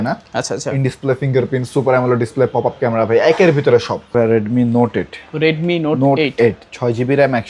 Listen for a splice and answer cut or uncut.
cut